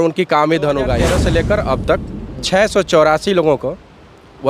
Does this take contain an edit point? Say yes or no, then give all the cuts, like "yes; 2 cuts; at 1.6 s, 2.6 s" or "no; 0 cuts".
yes; 1 cut; at 1.1 s